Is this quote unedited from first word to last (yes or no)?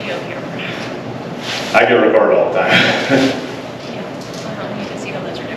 yes